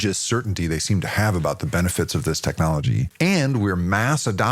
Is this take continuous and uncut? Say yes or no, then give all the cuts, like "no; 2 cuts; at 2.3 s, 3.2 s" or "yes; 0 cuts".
no; 1 cut; at 3.1 s